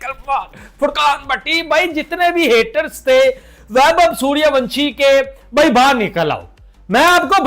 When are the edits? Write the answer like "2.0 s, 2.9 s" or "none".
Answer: none